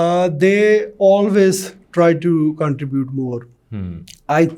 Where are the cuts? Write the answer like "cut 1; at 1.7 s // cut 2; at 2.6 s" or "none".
none